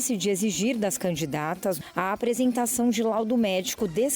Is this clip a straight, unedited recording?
no; 1 cut; at 1.8 s

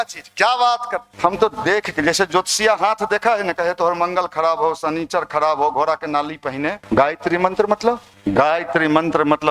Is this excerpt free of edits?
no; 3 cuts; at 1.0 s, 6.8 s, 8.1 s

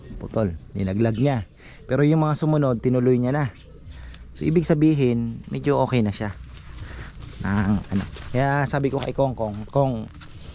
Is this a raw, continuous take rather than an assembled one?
yes; 0 cuts

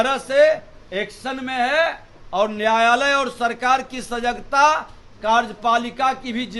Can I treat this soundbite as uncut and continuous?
yes; 0 cuts

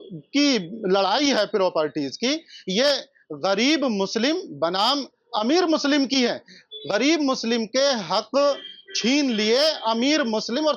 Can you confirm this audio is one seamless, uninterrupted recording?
yes; 0 cuts

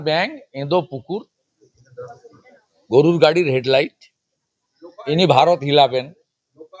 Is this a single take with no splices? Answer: yes; 0 cuts

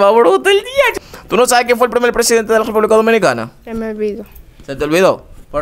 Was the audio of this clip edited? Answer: yes; 1 cut; at 1.0 s

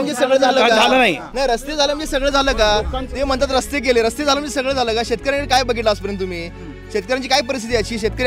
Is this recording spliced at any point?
no; 0 cuts

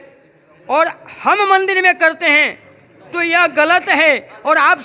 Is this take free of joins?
yes; 0 cuts

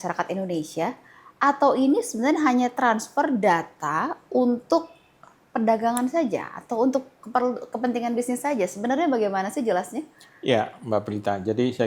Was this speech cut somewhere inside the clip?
no; 0 cuts

